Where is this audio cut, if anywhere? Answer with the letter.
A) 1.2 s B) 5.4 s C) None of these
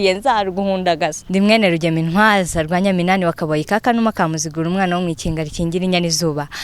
A